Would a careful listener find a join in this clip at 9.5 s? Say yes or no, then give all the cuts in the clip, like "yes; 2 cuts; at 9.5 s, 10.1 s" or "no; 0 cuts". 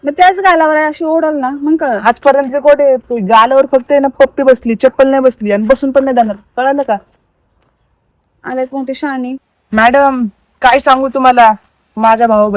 yes; 1 cut; at 9.5 s